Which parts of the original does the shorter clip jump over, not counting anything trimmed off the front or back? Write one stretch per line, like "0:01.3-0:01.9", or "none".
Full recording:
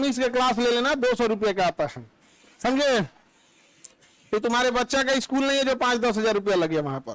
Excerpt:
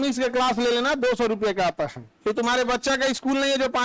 0:02.1-0:04.1

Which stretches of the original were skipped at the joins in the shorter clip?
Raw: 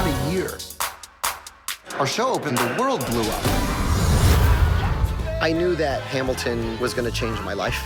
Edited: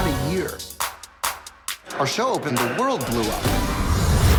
none

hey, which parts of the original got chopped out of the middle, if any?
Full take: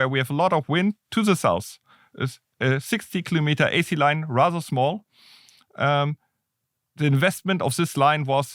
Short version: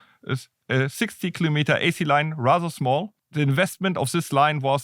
0:05.1-0:06.8

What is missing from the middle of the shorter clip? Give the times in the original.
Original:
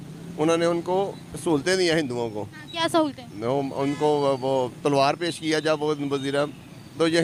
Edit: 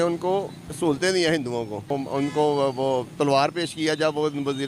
0:02.5-0:03.6

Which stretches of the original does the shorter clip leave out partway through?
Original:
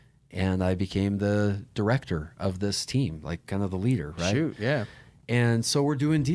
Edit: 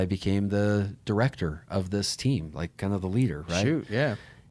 none

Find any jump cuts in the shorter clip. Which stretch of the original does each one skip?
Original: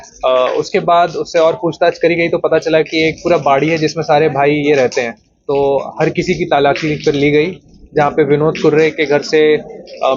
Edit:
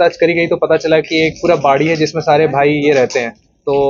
none

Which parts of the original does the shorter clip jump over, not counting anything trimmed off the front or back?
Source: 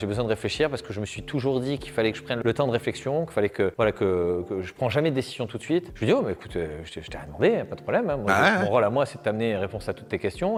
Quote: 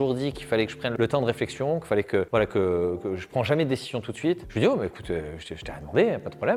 none

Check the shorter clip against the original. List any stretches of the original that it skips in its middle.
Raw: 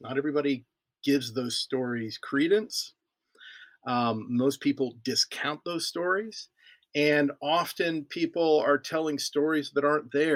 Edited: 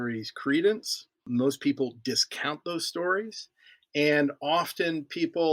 0:03.1-0:04.2

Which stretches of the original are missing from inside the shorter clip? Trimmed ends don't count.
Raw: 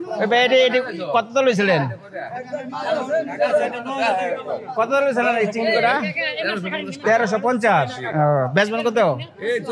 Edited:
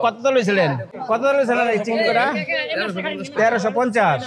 0:02.0-0:04.6

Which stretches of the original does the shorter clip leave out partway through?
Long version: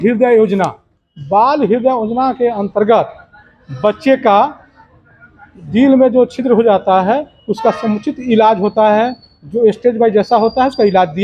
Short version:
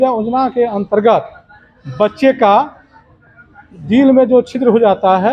none

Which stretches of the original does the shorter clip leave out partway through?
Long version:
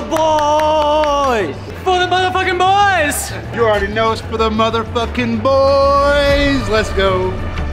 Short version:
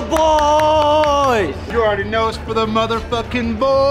0:01.6-0:03.4

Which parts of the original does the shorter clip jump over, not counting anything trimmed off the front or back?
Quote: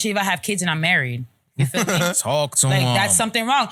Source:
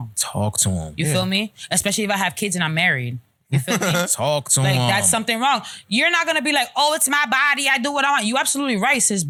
none

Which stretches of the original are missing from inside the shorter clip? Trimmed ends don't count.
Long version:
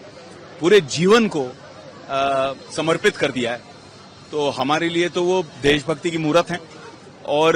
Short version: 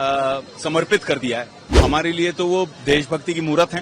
0:03.9-0:04.5

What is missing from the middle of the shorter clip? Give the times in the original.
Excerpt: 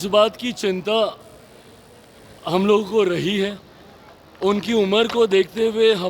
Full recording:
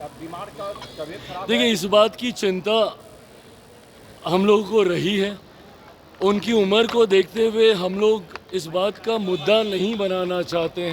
none

